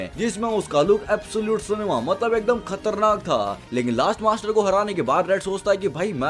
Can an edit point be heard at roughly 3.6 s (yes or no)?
yes